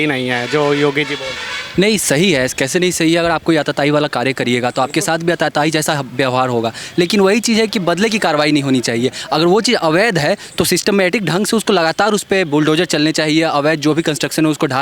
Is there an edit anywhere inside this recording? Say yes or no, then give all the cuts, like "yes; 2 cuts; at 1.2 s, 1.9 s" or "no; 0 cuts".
no; 0 cuts